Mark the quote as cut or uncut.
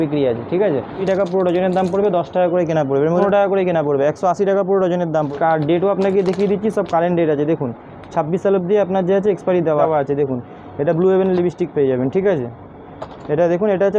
cut